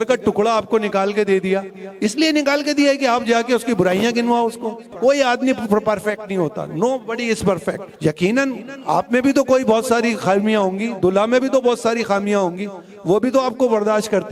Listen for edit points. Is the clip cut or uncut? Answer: uncut